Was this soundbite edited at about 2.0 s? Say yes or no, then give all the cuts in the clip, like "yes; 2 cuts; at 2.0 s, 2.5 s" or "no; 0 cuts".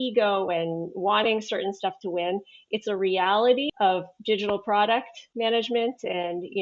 no; 1 cut; at 3.7 s